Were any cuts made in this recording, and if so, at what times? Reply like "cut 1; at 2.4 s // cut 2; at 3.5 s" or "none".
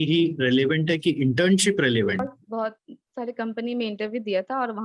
cut 1; at 2.4 s

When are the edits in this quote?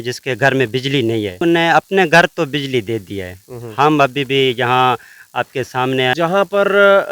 cut 1; at 1.4 s // cut 2; at 6.1 s

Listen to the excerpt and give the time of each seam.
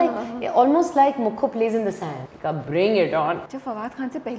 cut 1; at 2.2 s // cut 2; at 3.4 s

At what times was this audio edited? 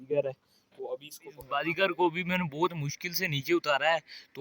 cut 1; at 1.4 s

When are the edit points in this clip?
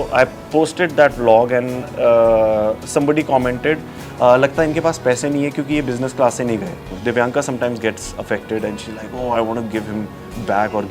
cut 1; at 6.8 s

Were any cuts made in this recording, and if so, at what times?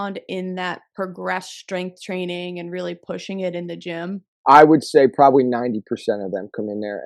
cut 1; at 4.3 s

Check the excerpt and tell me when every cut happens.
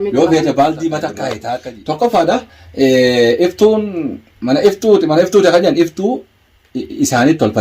cut 1; at 1.5 s

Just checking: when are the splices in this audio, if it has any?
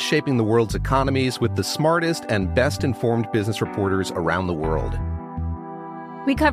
none

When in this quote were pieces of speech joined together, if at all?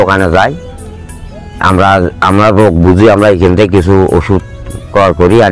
none

